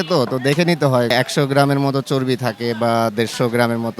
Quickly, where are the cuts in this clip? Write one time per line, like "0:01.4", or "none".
0:01.1

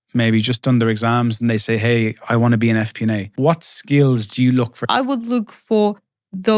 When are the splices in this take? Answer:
0:03.3
0:05.0

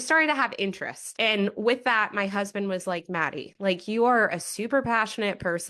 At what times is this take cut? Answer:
none

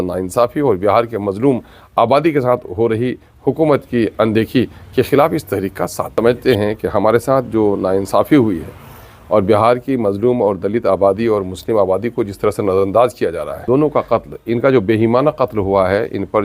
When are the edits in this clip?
0:06.1
0:13.6

